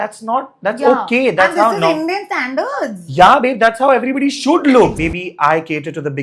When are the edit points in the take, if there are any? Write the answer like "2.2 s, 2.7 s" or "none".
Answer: 5.0 s